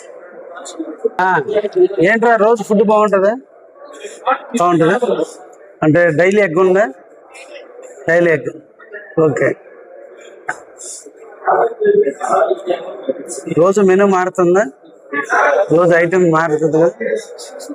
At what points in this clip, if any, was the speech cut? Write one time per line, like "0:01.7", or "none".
0:01.2